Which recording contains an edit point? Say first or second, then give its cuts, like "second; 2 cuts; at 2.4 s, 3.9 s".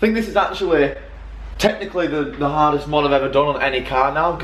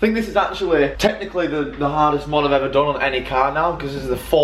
second; 1 cut; at 0.9 s